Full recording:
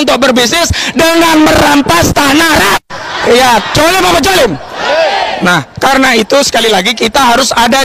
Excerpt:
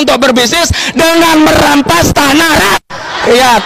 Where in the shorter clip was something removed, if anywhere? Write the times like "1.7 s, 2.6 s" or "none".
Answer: none